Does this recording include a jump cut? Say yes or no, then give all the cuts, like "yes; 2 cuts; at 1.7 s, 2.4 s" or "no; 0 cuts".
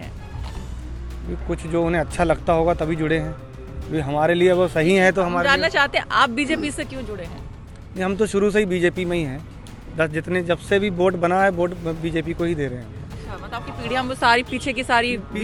no; 0 cuts